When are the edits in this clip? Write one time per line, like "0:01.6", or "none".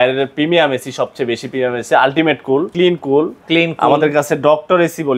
0:02.7